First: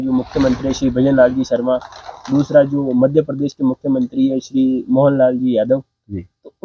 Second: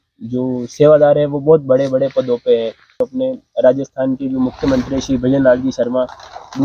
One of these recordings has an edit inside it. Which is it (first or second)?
second